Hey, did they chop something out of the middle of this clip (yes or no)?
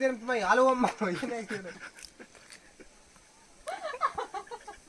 no